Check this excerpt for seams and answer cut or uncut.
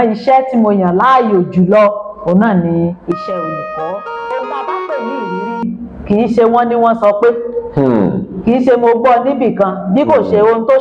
cut